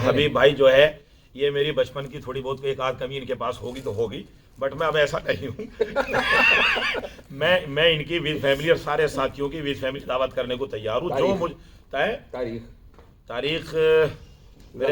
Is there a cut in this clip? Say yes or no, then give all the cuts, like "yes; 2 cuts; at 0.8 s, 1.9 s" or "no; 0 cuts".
no; 0 cuts